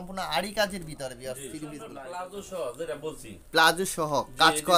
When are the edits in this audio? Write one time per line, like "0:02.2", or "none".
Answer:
0:01.9